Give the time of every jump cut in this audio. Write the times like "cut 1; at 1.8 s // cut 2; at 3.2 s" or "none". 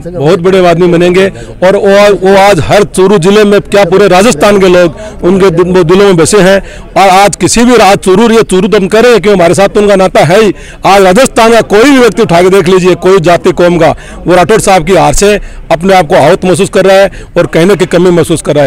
none